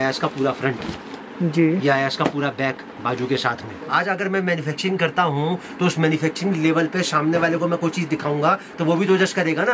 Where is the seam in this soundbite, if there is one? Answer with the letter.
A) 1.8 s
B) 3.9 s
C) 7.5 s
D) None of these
B